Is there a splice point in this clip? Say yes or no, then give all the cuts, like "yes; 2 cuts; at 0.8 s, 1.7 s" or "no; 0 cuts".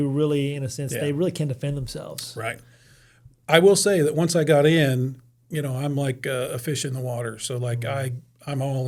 no; 0 cuts